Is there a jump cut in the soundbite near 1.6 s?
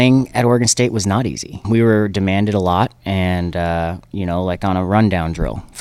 yes; 1 cut; at 1.6 s

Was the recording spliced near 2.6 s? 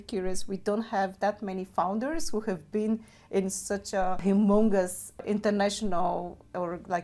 no; 2 cuts; at 4.2 s, 5.2 s

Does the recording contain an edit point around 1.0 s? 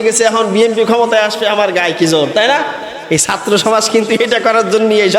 no; 1 cut; at 2.9 s

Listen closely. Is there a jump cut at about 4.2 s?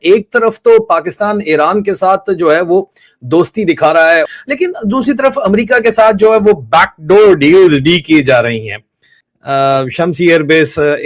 yes; 1 cut; at 4.2 s

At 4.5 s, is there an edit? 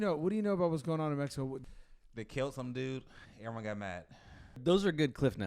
yes; 2 cuts; at 1.6 s, 4.5 s

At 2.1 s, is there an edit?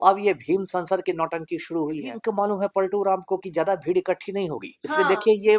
yes; 1 cut; at 2.1 s

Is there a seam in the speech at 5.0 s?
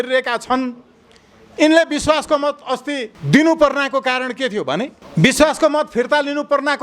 yes; 2 cuts; at 3.1 s, 5.0 s

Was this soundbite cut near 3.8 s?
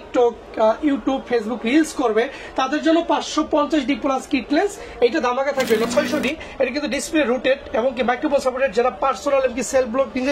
no; 1 cut; at 5.9 s

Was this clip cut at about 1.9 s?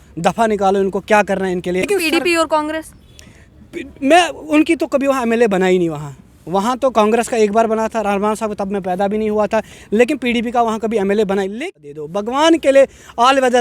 yes; 2 cuts; at 1.9 s, 11.5 s

